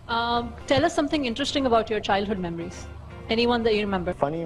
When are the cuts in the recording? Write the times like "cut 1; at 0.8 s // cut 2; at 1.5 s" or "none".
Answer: none